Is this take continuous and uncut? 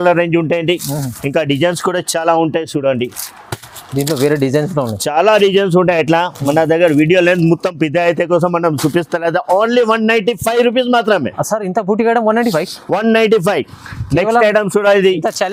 yes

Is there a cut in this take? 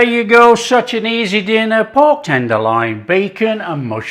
no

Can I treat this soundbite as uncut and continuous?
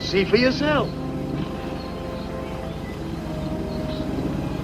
no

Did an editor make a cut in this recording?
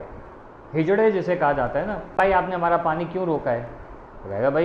yes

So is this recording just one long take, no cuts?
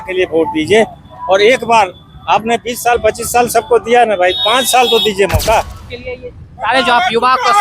no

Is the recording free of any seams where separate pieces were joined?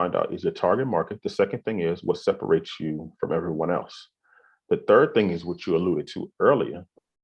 yes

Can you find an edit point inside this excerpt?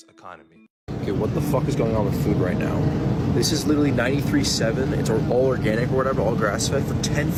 no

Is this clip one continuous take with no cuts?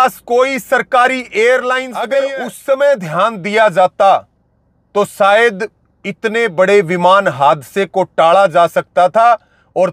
no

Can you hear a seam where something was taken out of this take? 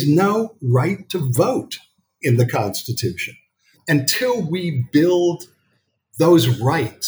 yes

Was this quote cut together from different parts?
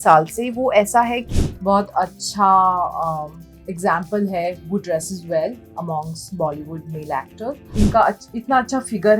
yes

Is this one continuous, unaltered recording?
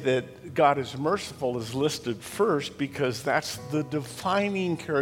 yes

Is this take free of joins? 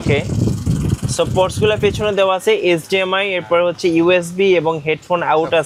yes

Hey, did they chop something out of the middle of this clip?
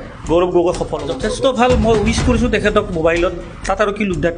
yes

